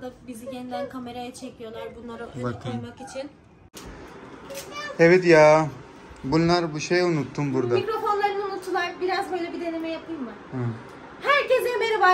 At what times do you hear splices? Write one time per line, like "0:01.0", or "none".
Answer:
0:03.7